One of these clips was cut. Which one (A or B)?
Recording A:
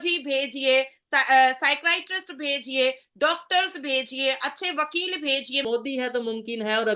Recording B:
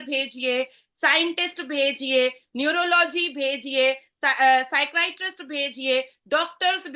A